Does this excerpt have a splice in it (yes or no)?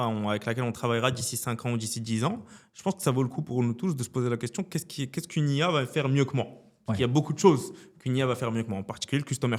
no